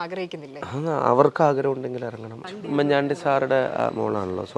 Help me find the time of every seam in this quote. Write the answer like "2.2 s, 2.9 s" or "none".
2.6 s